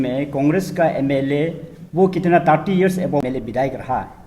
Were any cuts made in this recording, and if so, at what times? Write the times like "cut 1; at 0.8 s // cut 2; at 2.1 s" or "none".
cut 1; at 3.2 s